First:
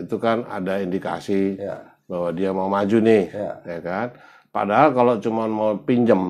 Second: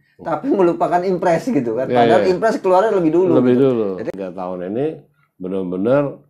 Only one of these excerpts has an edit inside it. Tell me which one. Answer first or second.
second